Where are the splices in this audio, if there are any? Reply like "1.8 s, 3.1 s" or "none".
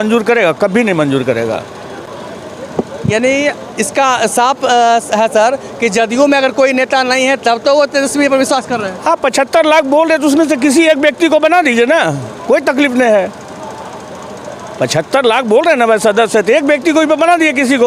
none